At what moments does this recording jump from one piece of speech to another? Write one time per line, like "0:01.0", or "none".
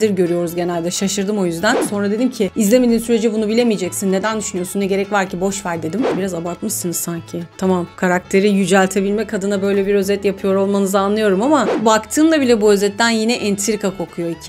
0:01.8
0:06.1
0:11.7